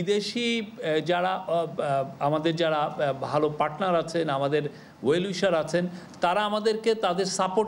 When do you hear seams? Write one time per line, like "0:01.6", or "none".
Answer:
none